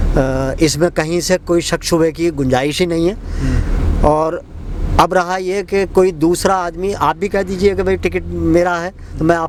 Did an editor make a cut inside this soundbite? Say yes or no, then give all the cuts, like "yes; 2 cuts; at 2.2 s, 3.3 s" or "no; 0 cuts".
no; 0 cuts